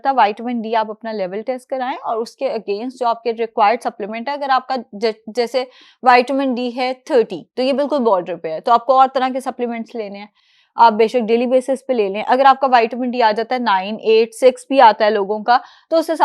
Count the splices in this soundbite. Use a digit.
0